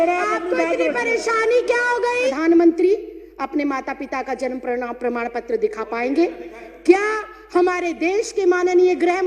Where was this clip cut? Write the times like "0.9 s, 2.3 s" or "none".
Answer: 2.3 s